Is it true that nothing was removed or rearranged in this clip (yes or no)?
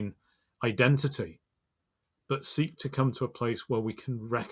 yes